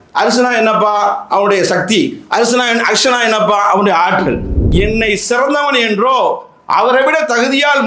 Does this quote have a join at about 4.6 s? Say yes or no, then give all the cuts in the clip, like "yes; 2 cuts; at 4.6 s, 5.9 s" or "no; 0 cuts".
yes; 1 cut; at 4.6 s